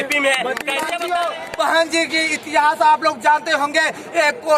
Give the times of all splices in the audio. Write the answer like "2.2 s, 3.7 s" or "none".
1.0 s